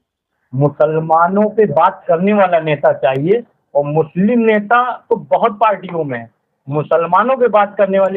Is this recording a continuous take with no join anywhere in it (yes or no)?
yes